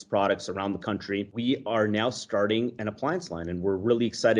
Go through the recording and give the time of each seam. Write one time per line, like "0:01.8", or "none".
0:01.3
0:02.7